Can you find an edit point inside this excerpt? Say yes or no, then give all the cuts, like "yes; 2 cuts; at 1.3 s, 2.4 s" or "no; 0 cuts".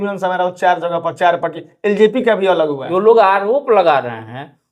yes; 1 cut; at 2.8 s